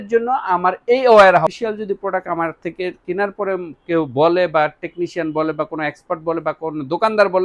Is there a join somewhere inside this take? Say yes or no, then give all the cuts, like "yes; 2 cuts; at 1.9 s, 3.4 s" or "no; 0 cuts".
yes; 1 cut; at 1.5 s